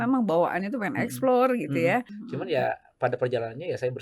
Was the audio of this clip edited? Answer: yes; 1 cut; at 2.2 s

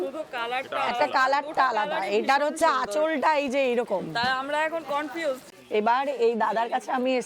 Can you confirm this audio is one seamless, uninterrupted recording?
no; 1 cut; at 5.5 s

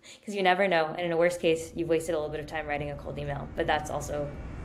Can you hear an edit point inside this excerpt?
no; 0 cuts

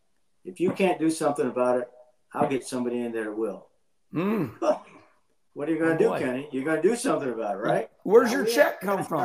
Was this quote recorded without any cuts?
no; 1 cut; at 8.0 s

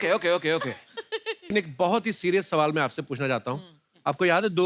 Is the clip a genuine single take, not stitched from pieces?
no; 1 cut; at 1.5 s

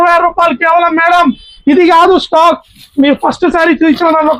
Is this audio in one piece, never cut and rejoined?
yes; 0 cuts

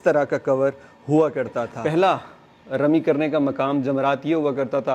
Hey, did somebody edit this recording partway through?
yes; 1 cut; at 1.7 s

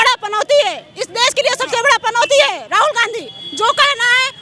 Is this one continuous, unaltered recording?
yes; 0 cuts

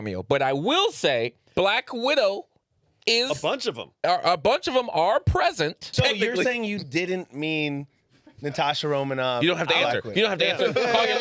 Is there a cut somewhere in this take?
yes; 2 cuts; at 1.5 s, 5.9 s

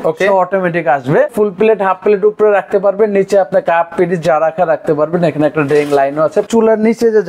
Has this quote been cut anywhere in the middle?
yes; 2 cuts; at 1.3 s, 6.5 s

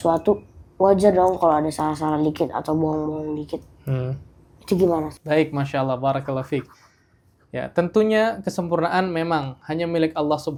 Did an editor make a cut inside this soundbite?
no; 0 cuts

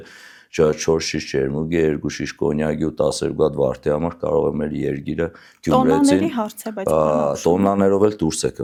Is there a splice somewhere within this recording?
no; 0 cuts

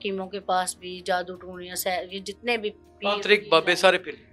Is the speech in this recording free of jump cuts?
yes; 0 cuts

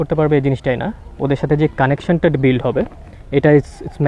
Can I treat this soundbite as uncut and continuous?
yes; 0 cuts

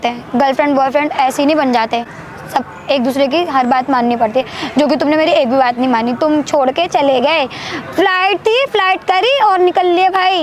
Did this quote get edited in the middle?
no; 0 cuts

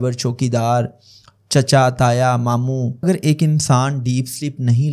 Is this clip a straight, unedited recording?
no; 1 cut; at 3.0 s

